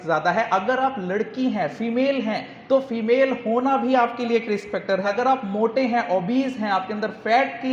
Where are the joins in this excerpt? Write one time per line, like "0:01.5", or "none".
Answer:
0:05.1